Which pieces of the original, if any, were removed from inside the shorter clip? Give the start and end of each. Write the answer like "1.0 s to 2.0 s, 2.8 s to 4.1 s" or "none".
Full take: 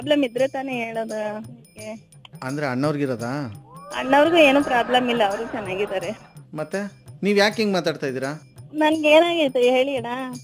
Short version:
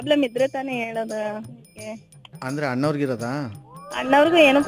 none